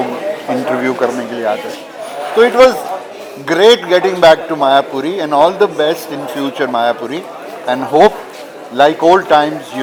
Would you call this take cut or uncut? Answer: uncut